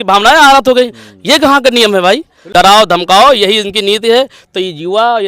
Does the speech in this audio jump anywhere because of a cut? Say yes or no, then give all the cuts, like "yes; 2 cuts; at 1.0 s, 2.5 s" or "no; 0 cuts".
yes; 1 cut; at 2.3 s